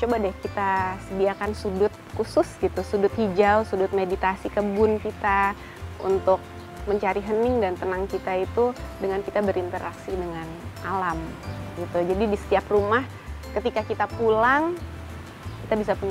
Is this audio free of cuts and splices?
yes; 0 cuts

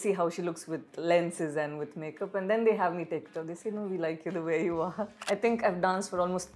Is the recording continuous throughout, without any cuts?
no; 1 cut; at 5.2 s

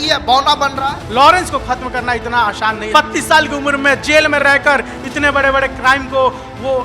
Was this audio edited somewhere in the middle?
yes; 2 cuts; at 1.0 s, 2.9 s

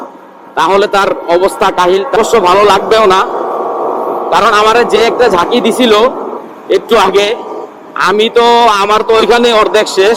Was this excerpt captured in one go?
no; 1 cut; at 2.2 s

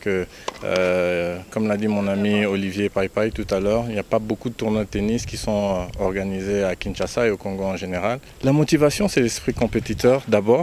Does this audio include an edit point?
yes; 1 cut; at 8.3 s

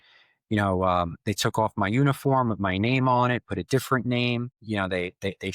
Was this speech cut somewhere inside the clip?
yes; 1 cut; at 4.6 s

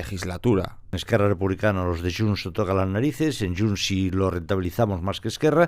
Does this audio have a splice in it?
yes; 1 cut; at 0.9 s

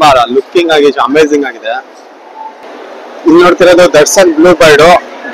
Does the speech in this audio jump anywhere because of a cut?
yes; 1 cut; at 2.6 s

